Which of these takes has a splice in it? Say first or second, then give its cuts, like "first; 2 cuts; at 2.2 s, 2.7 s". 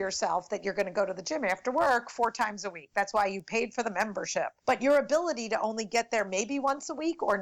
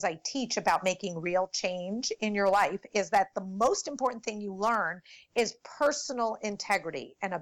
first; 1 cut; at 4.6 s